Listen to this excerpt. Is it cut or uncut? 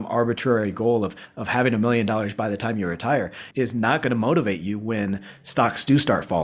uncut